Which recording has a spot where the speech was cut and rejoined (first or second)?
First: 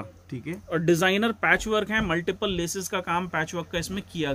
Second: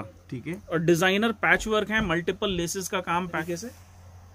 second